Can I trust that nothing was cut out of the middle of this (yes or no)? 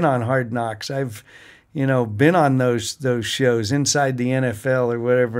yes